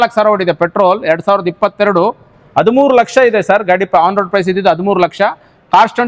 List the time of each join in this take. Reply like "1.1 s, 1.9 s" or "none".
none